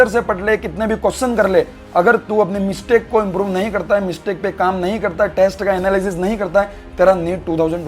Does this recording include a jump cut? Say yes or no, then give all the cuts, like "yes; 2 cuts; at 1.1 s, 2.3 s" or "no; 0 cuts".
no; 0 cuts